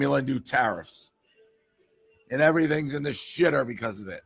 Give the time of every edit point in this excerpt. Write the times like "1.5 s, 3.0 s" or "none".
none